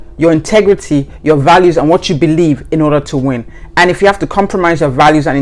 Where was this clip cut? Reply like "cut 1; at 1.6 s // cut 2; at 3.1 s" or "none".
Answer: none